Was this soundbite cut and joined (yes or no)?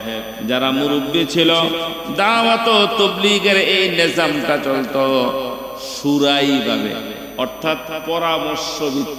no